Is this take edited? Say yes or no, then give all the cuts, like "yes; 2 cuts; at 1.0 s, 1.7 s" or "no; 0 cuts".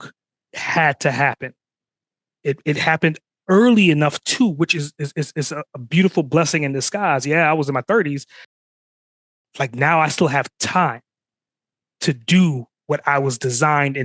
no; 0 cuts